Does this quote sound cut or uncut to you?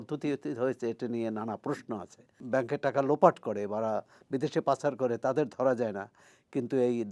cut